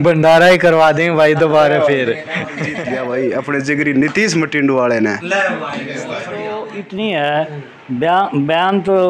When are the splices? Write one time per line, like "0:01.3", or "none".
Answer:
0:02.8
0:06.6